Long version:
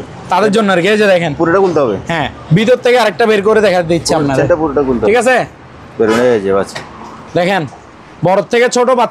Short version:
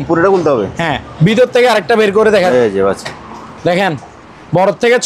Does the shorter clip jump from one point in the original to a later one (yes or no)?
yes